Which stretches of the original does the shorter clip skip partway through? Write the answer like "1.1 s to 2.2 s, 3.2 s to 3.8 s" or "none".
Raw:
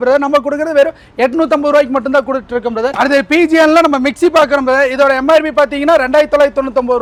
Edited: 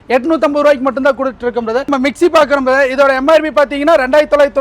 3.0 s to 3.9 s